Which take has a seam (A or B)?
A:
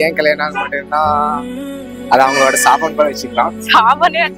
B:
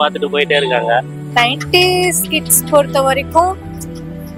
B